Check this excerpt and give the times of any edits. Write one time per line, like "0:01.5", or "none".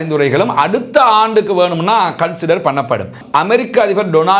0:03.2